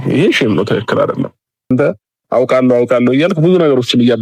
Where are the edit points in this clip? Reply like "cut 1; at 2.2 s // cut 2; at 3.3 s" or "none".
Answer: cut 1; at 1.7 s